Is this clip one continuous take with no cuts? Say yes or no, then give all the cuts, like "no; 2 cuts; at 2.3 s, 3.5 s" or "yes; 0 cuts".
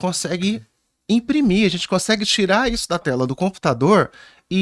yes; 0 cuts